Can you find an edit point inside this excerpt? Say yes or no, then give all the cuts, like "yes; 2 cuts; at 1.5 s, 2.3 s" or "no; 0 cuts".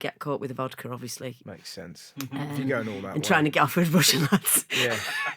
yes; 1 cut; at 1.4 s